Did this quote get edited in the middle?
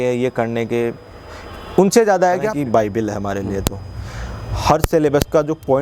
yes; 1 cut; at 2.5 s

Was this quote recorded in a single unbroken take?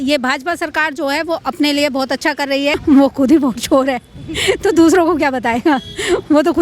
no; 1 cut; at 2.8 s

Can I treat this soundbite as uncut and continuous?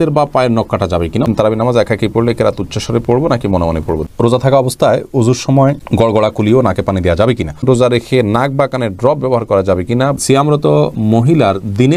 no; 4 cuts; at 1.3 s, 4.0 s, 7.6 s, 10.2 s

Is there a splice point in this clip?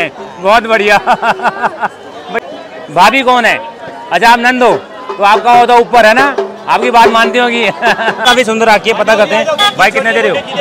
yes; 2 cuts; at 2.3 s, 8.2 s

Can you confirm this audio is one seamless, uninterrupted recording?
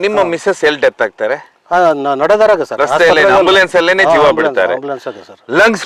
yes; 0 cuts

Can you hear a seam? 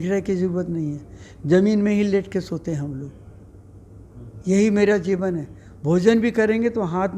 no; 0 cuts

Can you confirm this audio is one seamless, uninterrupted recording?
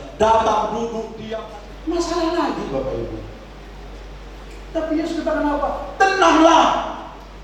no; 1 cut; at 1.2 s

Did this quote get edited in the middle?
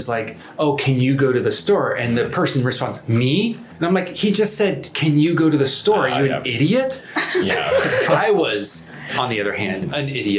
no; 0 cuts

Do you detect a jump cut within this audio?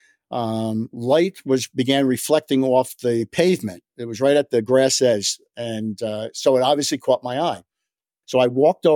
no; 0 cuts

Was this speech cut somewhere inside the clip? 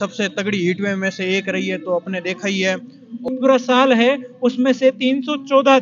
yes; 1 cut; at 3.3 s

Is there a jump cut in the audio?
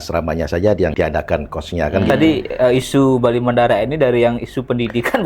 yes; 2 cuts; at 0.9 s, 2.5 s

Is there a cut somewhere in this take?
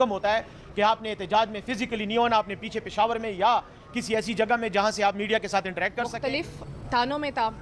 yes; 1 cut; at 6.1 s

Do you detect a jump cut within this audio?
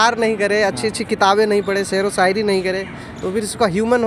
no; 0 cuts

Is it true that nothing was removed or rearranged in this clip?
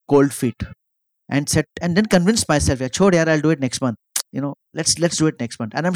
yes; 0 cuts

